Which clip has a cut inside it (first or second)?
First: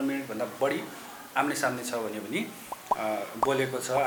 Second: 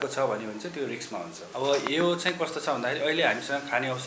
second